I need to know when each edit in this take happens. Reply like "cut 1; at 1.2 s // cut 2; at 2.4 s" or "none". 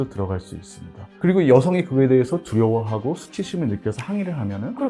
cut 1; at 1.1 s